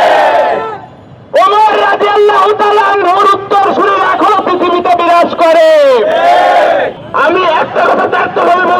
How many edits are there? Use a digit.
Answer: 1